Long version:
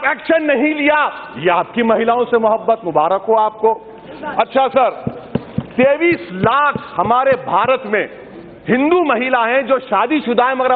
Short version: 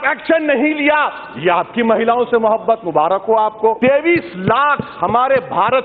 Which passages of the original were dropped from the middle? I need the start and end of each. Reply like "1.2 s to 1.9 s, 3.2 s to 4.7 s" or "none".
3.8 s to 5.7 s

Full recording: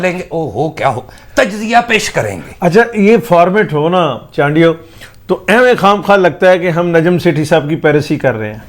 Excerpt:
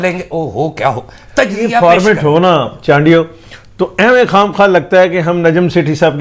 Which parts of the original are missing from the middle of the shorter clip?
1.8 s to 3.3 s

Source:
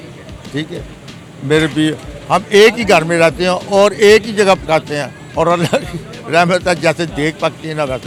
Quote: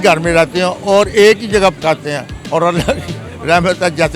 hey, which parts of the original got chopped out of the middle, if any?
none

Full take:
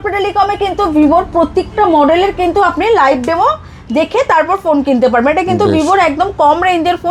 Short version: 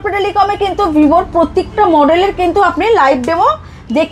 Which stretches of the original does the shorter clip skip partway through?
none

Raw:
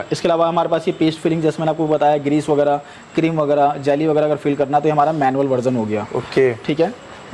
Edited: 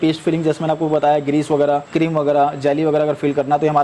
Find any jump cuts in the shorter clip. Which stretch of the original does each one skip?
2.9 s to 3.1 s

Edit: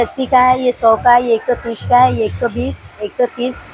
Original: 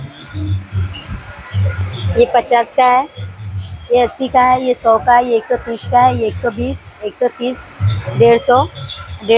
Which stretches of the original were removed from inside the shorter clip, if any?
none

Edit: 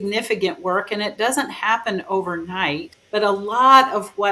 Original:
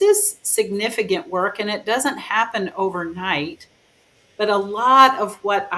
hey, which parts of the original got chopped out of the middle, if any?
3.6 s to 4.2 s

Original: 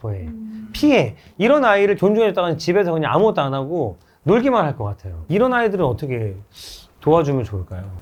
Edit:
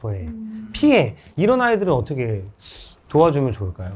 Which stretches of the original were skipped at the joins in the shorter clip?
1.2 s to 5.1 s

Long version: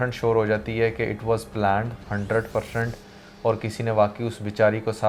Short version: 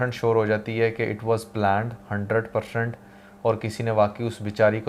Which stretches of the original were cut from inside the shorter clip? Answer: none

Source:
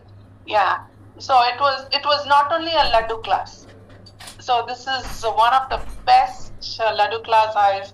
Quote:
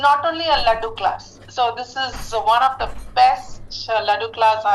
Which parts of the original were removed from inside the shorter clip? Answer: 3.6 s to 4.3 s

